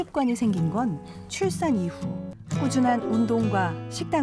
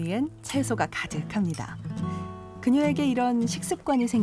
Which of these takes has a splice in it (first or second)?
first